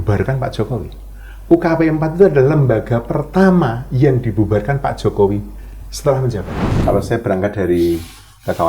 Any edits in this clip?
yes; 1 cut; at 6.8 s

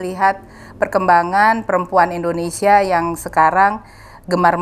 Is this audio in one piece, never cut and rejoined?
yes; 0 cuts

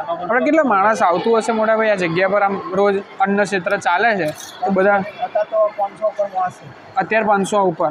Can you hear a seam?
no; 0 cuts

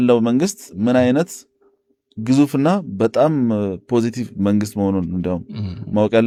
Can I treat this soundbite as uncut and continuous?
yes; 0 cuts

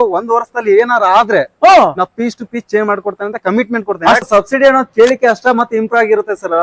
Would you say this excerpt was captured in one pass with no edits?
no; 1 cut; at 4.2 s

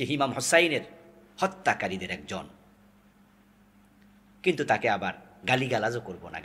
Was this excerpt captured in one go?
yes; 0 cuts

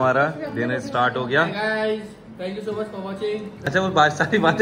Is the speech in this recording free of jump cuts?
no; 1 cut; at 3.7 s

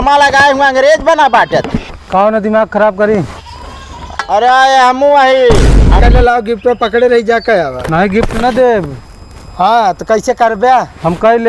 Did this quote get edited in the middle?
yes; 1 cut; at 6.0 s

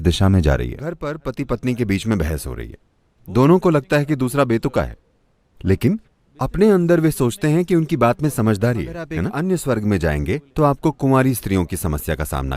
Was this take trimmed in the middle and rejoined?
yes; 2 cuts; at 1.1 s, 9.2 s

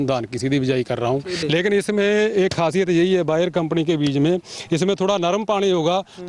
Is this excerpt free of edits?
no; 1 cut; at 1.4 s

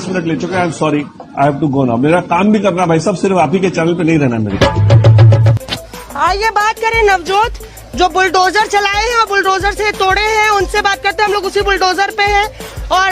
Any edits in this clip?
yes; 1 cut; at 5.5 s

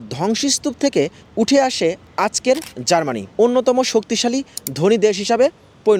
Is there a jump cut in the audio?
no; 0 cuts

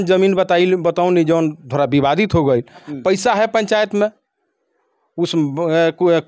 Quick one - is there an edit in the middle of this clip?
yes; 1 cut; at 2.9 s

